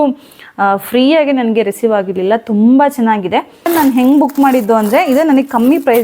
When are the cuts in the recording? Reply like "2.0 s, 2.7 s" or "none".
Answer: 3.7 s